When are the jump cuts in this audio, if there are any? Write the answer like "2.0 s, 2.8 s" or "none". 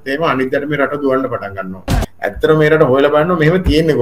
1.9 s